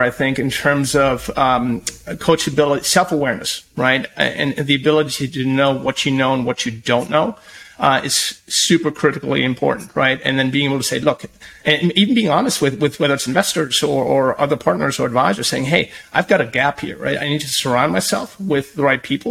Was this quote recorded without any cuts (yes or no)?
yes